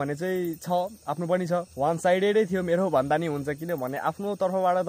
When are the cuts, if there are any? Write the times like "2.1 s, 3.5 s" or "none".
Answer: 1.7 s